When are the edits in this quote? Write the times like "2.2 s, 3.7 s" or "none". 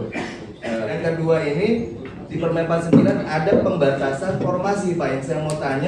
0.9 s